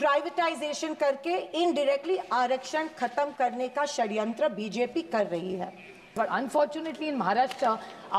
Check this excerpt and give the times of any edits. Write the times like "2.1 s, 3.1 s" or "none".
6.1 s